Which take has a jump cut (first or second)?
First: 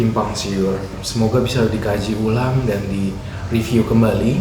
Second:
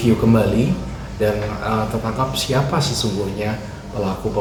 first